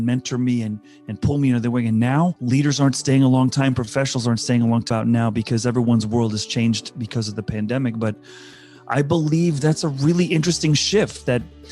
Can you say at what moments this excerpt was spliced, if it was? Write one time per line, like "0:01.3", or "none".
0:02.4
0:04.9